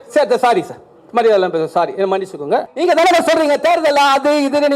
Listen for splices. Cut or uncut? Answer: cut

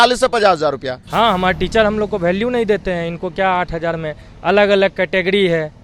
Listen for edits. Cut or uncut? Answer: cut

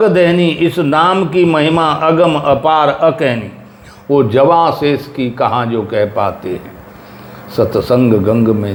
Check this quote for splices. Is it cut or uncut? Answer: uncut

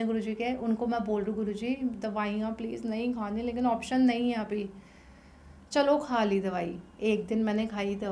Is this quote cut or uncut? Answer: uncut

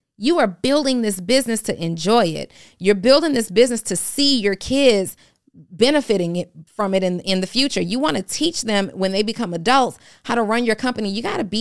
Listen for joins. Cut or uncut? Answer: uncut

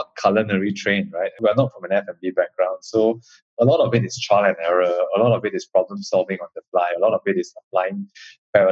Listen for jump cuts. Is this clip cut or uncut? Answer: cut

